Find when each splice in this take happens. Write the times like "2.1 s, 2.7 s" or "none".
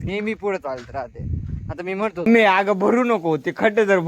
2.2 s